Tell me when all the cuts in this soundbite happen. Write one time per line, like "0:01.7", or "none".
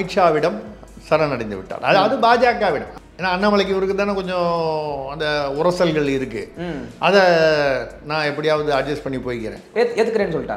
0:02.9
0:09.6